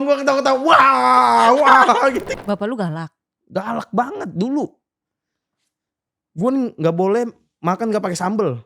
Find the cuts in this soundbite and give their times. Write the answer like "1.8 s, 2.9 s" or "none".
2.3 s